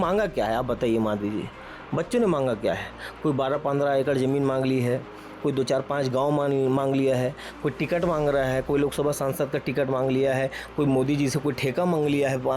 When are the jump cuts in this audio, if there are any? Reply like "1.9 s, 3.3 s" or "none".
none